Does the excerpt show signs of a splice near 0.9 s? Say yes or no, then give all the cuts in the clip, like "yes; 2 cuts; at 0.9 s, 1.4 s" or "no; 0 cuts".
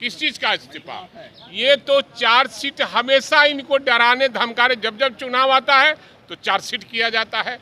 no; 0 cuts